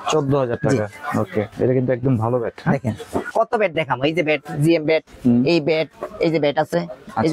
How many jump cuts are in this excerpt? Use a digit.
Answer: 1